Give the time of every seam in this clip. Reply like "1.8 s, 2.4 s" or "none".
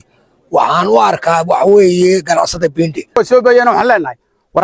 3.2 s